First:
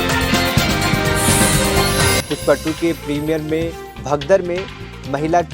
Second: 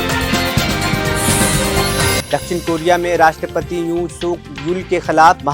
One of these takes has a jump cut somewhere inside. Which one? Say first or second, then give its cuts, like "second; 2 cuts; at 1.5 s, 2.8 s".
first; 1 cut; at 2.2 s